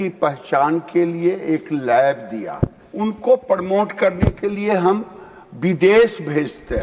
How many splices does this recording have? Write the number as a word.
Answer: one